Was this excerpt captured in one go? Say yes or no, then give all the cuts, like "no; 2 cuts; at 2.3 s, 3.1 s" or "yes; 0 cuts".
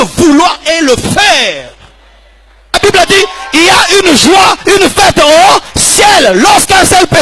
no; 1 cut; at 2.7 s